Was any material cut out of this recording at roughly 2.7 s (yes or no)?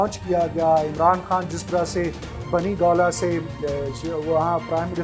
no